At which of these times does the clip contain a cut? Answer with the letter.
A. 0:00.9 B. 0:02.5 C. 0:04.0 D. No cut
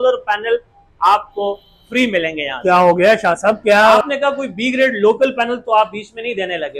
C